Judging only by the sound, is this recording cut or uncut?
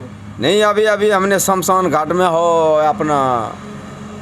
uncut